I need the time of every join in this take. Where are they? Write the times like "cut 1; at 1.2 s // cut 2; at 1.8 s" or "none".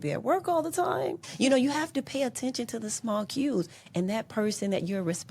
cut 1; at 1.2 s